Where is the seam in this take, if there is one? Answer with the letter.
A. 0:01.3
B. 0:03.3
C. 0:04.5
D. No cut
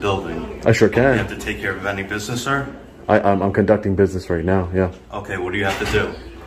D